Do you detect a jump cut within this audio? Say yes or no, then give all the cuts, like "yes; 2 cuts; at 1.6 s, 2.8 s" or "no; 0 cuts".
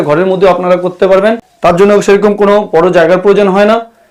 no; 0 cuts